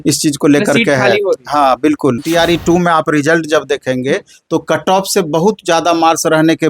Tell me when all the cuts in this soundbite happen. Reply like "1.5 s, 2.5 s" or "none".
2.2 s